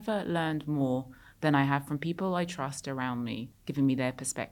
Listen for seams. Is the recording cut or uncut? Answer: cut